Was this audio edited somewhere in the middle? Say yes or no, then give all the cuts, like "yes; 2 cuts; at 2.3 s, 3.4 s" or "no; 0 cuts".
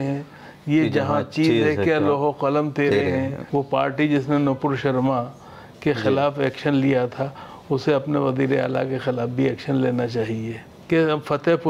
yes; 2 cuts; at 3.4 s, 10.7 s